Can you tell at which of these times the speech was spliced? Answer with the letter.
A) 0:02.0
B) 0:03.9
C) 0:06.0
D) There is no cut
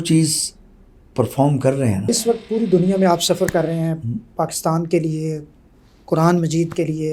A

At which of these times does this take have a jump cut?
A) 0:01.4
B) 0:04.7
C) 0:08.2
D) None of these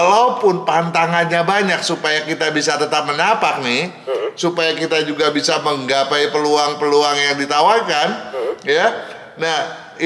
D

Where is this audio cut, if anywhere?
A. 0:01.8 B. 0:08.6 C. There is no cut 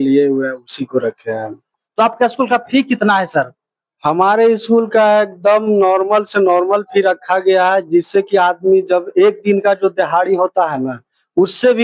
A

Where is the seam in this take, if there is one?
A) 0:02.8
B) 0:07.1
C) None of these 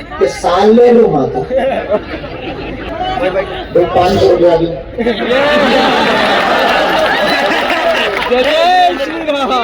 A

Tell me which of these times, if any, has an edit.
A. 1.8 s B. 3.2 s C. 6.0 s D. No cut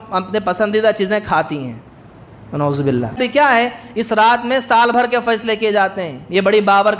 B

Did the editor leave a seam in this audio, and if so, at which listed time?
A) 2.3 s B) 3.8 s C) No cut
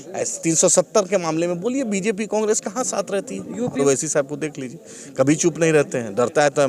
B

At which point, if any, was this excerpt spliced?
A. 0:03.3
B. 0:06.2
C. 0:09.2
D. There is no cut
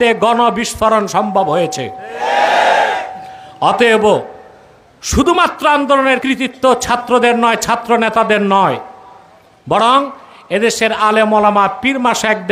B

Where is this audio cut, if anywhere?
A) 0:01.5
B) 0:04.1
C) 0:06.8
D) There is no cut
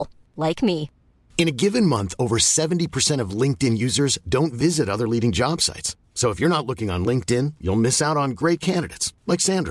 D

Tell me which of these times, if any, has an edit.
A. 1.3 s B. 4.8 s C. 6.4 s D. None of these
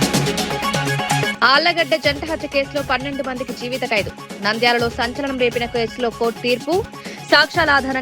A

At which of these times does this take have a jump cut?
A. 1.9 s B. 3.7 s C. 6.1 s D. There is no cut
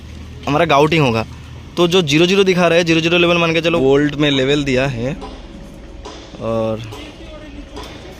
B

